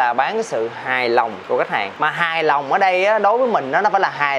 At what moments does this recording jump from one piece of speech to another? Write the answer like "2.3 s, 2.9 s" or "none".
none